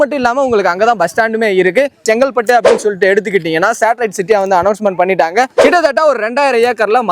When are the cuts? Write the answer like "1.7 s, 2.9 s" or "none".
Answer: 2.0 s, 5.5 s